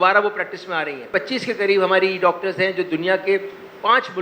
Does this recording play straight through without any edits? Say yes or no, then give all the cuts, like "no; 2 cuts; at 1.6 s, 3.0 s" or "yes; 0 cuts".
yes; 0 cuts